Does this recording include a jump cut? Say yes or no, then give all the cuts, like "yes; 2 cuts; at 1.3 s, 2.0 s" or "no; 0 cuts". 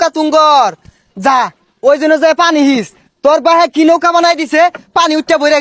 no; 0 cuts